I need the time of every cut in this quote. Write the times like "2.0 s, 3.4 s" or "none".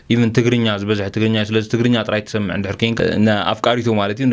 3.0 s